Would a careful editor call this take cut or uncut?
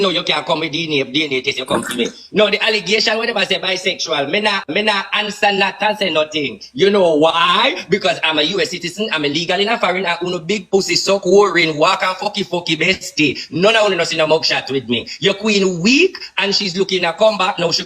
uncut